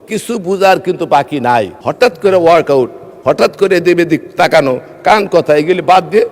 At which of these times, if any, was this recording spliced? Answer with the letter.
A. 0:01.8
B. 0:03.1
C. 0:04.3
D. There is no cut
A